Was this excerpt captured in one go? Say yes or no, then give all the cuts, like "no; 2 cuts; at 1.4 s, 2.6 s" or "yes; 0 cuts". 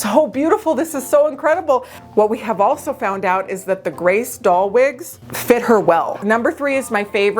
no; 2 cuts; at 1.9 s, 6.2 s